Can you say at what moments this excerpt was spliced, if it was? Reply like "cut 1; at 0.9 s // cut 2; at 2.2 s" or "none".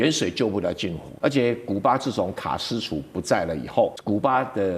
cut 1; at 1.1 s // cut 2; at 4.0 s